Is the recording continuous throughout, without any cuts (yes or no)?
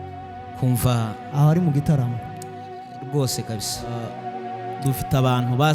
no